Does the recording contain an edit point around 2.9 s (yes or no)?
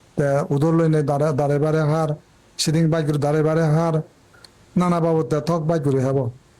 no